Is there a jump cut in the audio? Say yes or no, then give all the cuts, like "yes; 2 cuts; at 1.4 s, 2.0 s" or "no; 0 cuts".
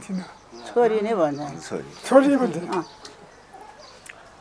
no; 0 cuts